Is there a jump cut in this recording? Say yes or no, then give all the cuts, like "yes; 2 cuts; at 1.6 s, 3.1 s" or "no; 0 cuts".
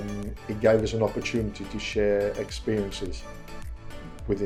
no; 0 cuts